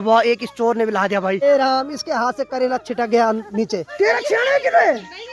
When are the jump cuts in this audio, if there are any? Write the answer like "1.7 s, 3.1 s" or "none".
1.4 s, 3.9 s